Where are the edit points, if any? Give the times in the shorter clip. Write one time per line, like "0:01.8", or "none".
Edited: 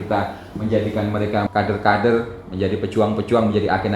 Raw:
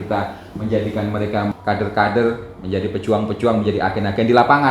0:01.5